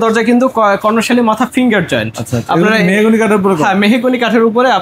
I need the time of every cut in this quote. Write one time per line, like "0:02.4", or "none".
none